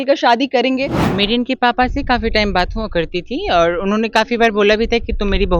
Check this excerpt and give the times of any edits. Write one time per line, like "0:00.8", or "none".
0:01.0